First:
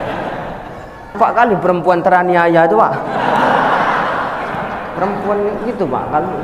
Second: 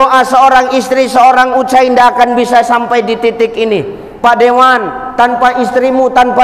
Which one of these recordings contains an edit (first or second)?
first